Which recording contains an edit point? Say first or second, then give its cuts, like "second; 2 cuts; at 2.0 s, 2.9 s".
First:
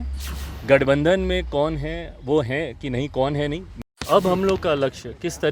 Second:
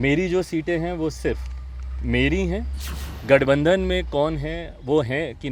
first; 1 cut; at 4.0 s